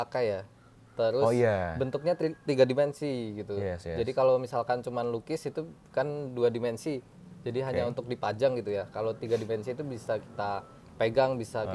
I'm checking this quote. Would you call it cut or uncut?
uncut